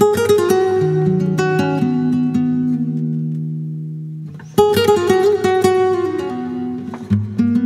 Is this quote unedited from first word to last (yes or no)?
yes